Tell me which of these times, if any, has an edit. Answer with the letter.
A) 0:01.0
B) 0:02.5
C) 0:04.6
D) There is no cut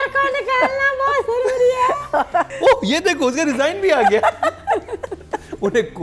B